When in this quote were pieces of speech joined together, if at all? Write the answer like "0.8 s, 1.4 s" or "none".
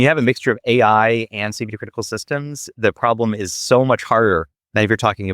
none